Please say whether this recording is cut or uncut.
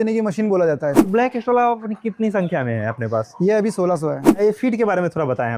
cut